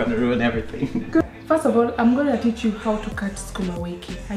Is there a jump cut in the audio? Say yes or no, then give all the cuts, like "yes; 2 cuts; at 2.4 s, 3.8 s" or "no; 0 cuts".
yes; 1 cut; at 1.2 s